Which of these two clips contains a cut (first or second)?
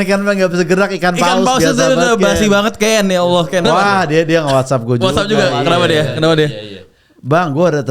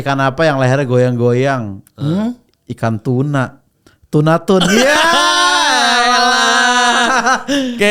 first